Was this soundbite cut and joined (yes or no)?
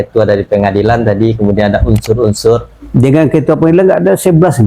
yes